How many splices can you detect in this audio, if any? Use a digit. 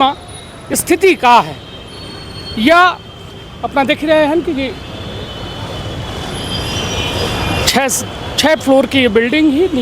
0